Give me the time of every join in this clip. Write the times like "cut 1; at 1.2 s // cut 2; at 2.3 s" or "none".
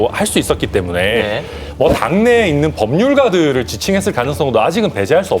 none